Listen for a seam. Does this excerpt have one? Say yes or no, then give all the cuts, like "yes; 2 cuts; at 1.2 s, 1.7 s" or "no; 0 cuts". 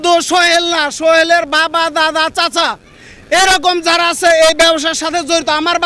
no; 0 cuts